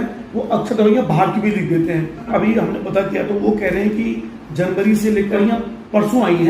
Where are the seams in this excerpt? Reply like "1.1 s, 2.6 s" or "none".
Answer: 2.3 s, 5.4 s